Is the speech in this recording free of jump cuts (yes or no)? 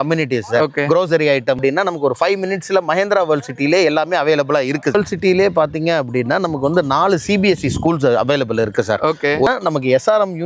no